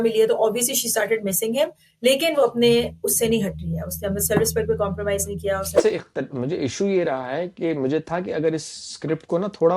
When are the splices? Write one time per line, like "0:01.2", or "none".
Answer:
0:05.8